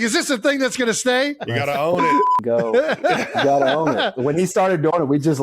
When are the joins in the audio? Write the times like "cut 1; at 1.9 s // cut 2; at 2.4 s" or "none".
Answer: cut 1; at 1.4 s // cut 2; at 4.1 s